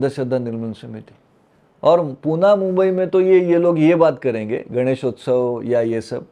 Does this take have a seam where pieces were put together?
no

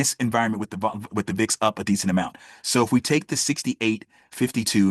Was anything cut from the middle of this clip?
no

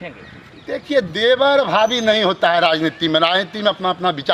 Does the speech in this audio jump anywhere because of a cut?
no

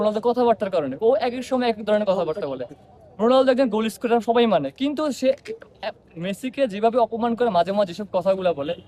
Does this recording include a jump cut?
no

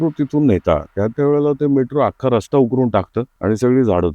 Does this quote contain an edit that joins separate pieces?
yes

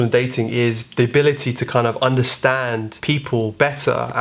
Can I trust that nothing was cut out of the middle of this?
no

